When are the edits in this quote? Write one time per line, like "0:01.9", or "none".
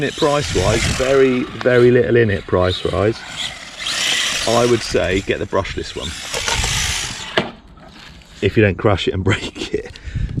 none